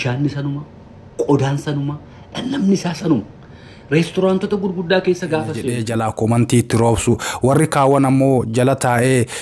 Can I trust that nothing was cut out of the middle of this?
no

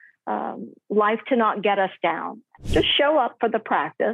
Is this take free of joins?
no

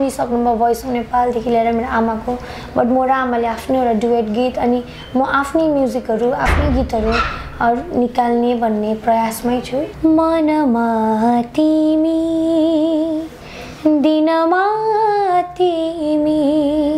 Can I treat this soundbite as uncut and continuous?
no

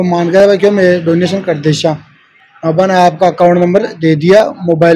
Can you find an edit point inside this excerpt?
no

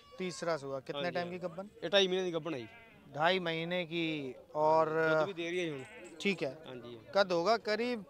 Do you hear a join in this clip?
no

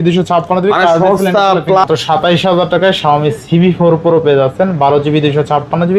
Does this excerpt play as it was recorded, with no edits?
no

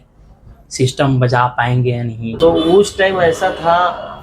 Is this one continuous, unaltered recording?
no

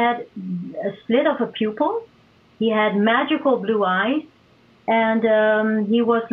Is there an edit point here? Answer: no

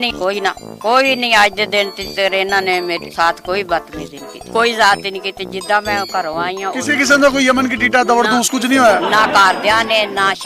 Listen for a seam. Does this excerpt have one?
no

